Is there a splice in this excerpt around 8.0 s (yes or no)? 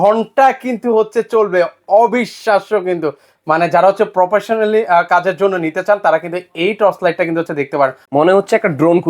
yes